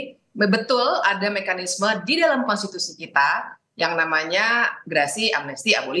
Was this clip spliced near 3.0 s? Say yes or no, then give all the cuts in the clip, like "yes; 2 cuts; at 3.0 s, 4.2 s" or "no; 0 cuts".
no; 0 cuts